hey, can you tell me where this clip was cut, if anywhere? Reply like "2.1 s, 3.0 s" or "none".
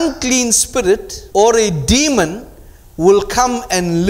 1.1 s